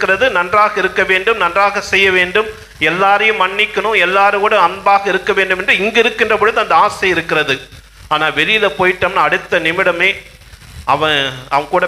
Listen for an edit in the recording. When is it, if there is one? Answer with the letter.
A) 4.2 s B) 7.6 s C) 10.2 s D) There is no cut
D